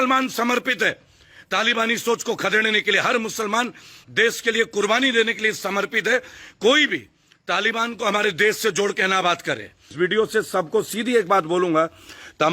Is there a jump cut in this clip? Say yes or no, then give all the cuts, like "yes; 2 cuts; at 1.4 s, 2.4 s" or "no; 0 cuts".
yes; 1 cut; at 9.9 s